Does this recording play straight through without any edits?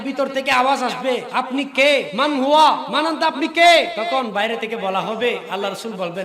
no; 4 cuts; at 1.3 s, 2.1 s, 2.9 s, 4.0 s

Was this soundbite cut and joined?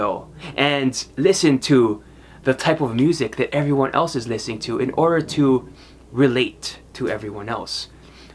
no; 0 cuts

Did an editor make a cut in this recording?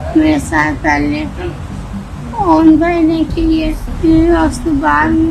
no; 0 cuts

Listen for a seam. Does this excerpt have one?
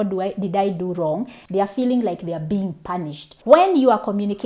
yes; 2 cuts; at 1.4 s, 3.3 s

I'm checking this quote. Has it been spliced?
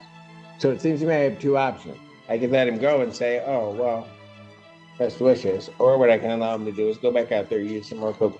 no; 0 cuts

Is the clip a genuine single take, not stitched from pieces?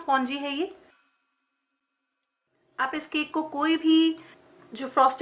yes; 0 cuts

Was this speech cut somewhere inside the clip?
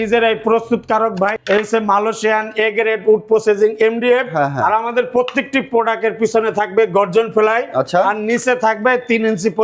yes; 1 cut; at 1.4 s

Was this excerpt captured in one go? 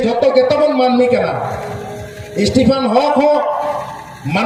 yes; 0 cuts

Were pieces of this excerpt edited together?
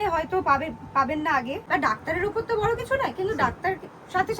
yes; 1 cut; at 1.6 s

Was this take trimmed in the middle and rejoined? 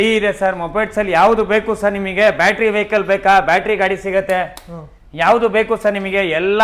no; 0 cuts

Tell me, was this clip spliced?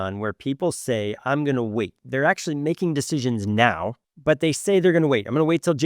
yes; 1 cut; at 4.1 s

